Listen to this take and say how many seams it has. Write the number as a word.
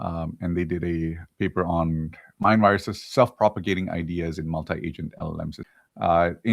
two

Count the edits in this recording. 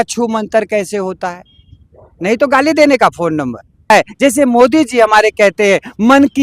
one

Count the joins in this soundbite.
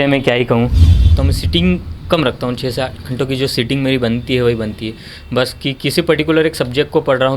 one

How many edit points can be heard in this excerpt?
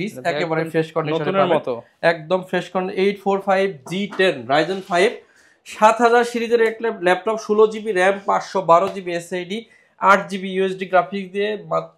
zero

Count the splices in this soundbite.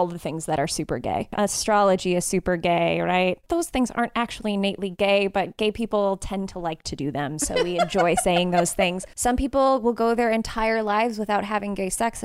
three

